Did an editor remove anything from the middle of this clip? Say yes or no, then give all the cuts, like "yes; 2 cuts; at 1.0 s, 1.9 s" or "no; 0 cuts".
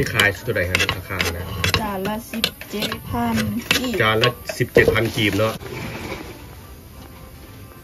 yes; 1 cut; at 5.6 s